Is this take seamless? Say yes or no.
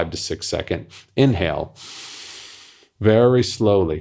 yes